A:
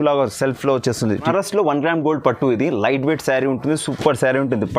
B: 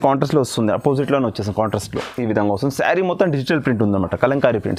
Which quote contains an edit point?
A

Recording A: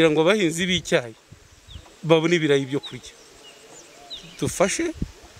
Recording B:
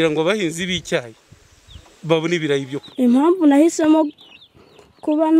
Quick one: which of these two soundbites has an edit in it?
B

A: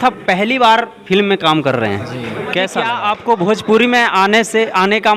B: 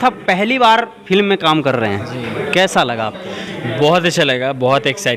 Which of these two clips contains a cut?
A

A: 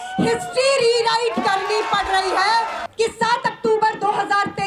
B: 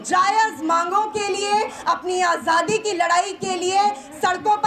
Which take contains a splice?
A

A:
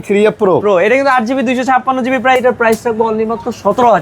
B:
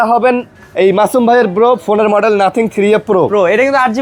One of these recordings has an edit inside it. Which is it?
A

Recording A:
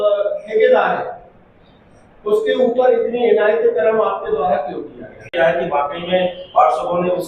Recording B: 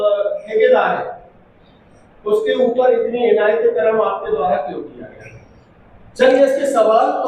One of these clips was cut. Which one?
A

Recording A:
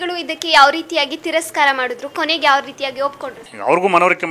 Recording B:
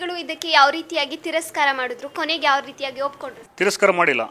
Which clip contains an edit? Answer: A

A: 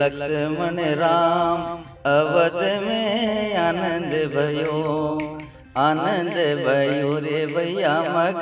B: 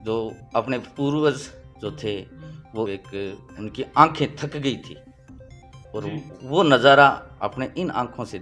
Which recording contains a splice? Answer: B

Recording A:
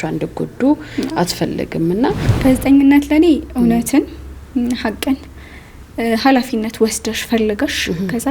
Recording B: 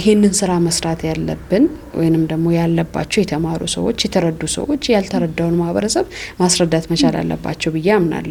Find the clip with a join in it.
A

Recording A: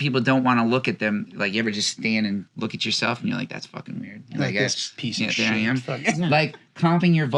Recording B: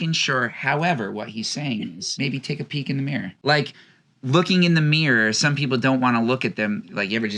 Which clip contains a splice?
B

